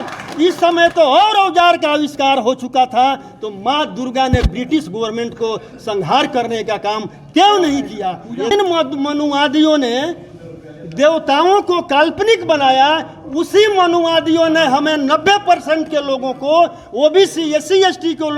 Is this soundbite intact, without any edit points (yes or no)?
no